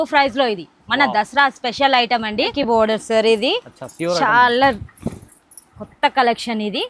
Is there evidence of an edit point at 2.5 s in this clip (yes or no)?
yes